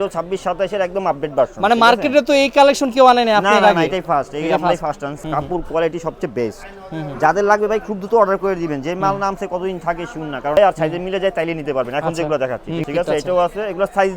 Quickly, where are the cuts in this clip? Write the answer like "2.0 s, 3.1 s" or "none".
5.2 s, 10.6 s, 12.8 s